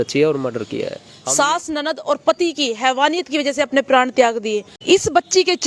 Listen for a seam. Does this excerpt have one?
yes; 2 cuts; at 1.0 s, 4.7 s

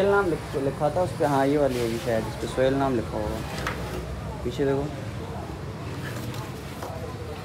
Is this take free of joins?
yes; 0 cuts

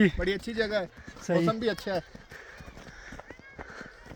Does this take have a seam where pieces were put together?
no; 0 cuts

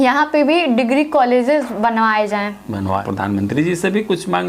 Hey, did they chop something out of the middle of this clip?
yes; 1 cut; at 3.0 s

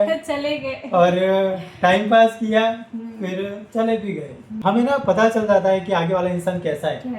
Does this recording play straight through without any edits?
no; 1 cut; at 4.5 s

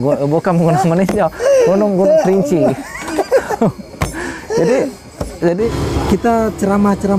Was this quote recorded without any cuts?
no; 1 cut; at 5.7 s

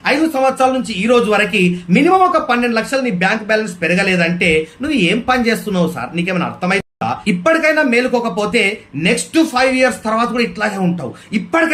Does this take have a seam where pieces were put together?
no; 0 cuts

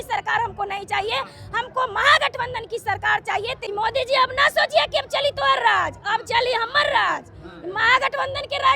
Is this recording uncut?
no; 1 cut; at 3.6 s

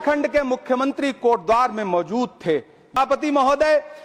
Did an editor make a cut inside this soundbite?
yes; 1 cut; at 3.0 s

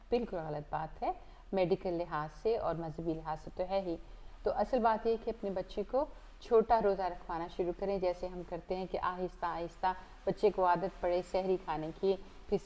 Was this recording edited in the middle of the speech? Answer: no; 0 cuts

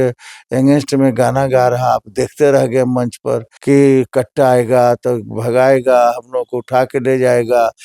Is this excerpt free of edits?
no; 1 cut; at 3.5 s

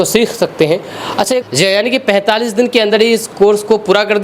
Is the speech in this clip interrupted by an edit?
yes; 1 cut; at 1.4 s

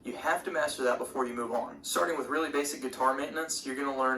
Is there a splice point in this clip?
yes; 1 cut; at 1.8 s

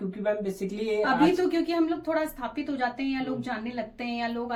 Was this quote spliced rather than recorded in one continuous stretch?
no; 0 cuts

